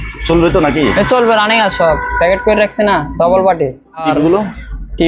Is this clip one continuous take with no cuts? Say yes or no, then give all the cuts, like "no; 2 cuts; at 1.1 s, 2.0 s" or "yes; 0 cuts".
no; 1 cut; at 4.0 s